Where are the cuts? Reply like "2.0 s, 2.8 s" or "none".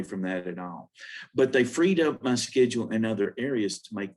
none